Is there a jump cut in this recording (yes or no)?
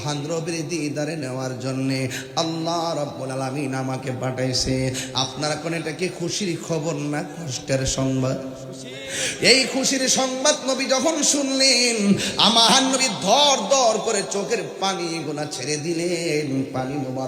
no